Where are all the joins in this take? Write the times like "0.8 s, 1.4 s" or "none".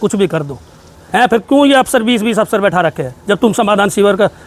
none